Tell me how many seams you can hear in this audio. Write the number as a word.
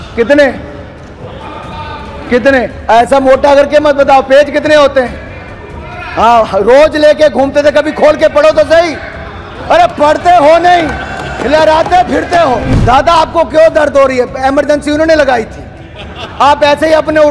one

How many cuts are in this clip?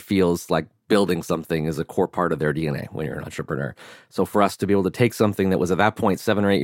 zero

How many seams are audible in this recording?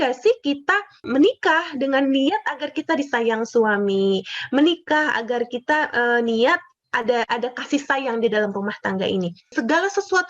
three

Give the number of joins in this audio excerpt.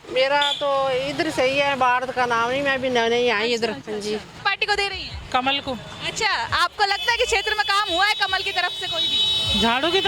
one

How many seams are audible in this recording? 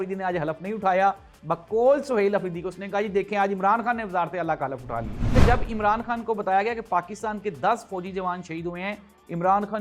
one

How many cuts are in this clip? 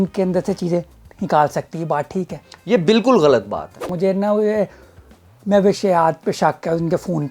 one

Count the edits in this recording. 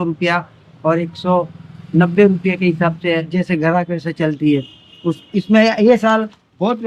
zero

